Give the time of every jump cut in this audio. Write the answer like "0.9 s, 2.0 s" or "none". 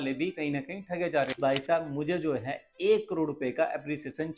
1.3 s